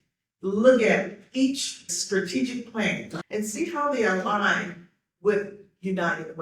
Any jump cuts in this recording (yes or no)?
yes